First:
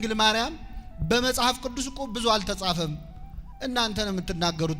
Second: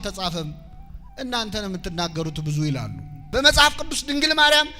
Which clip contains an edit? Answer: second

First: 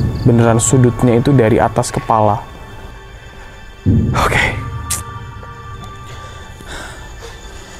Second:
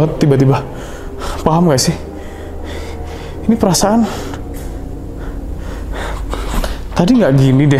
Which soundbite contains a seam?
first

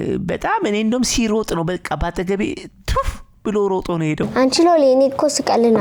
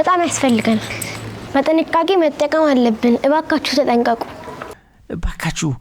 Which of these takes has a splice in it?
second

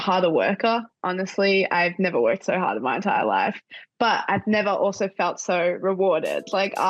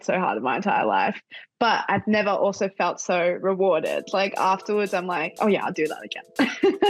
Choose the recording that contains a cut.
first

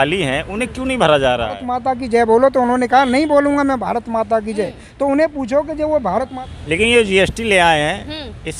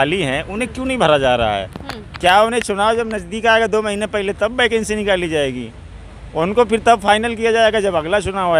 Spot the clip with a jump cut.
first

